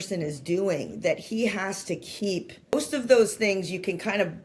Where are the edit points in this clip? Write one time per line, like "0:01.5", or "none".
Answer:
0:02.7